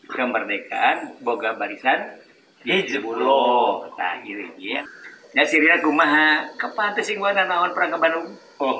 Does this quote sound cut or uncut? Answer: cut